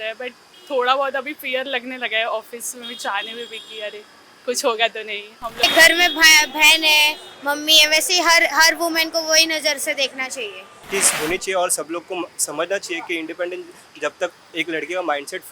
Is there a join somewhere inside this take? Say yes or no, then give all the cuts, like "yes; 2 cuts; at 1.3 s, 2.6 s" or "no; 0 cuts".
yes; 2 cuts; at 5.6 s, 10.9 s